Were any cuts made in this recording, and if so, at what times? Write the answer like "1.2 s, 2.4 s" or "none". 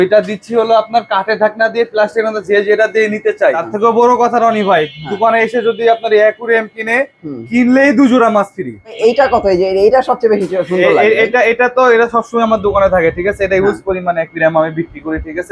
3.7 s, 8.9 s